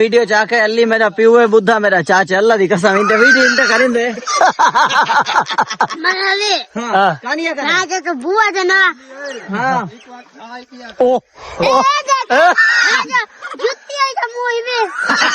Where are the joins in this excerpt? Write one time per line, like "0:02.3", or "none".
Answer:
none